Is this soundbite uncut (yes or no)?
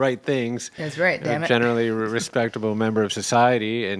yes